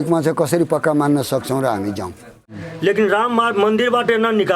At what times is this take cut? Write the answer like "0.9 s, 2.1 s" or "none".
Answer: 2.7 s